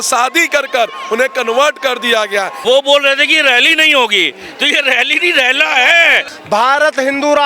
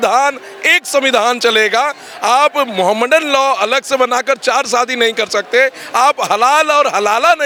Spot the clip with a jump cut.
first; 2 cuts; at 2.5 s, 6.3 s

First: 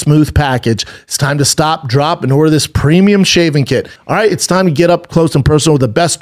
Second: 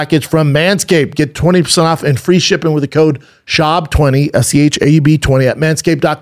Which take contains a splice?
first; 1 cut; at 4.0 s

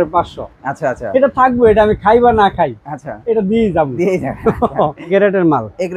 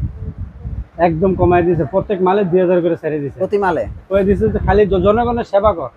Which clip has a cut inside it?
first; 1 cut; at 5.0 s

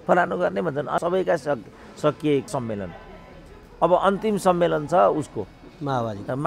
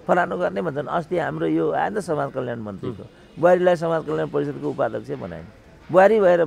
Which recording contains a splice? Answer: first; 2 cuts; at 1.0 s, 2.5 s

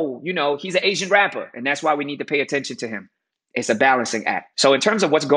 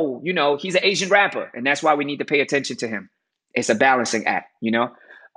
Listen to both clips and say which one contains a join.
first; 1 cut; at 4.4 s

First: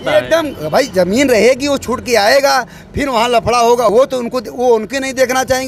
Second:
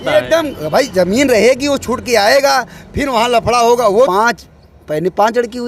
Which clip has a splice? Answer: second; 1 cut; at 3.9 s

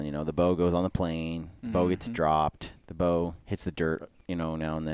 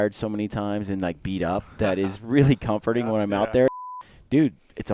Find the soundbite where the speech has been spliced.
second; 1 cut; at 3.8 s

